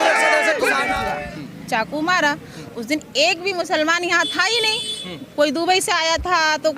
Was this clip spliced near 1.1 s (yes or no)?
yes